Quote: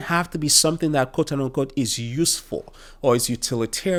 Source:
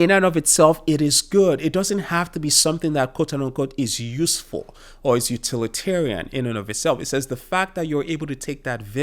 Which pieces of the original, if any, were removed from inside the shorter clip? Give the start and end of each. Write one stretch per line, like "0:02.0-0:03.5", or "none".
none